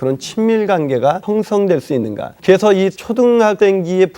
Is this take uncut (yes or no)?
no